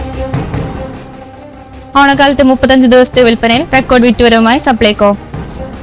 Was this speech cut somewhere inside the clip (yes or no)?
no